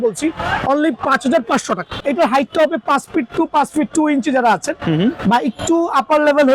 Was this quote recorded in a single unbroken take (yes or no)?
no